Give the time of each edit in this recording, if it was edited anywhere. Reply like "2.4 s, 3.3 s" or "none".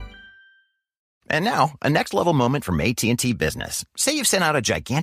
1.1 s